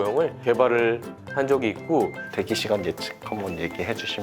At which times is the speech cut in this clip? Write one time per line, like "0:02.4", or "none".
0:02.2